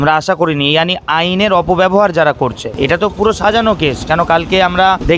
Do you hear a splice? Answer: no; 0 cuts

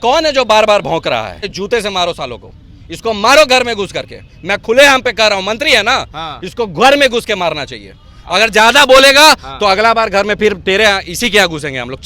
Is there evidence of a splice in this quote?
yes; 1 cut; at 1.5 s

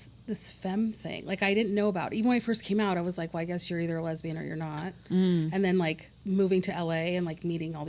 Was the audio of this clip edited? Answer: yes; 1 cut; at 6.1 s

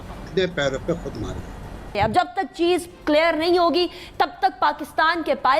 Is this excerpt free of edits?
no; 1 cut; at 1.9 s

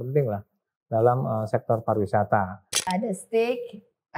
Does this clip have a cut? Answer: yes; 1 cut; at 2.9 s

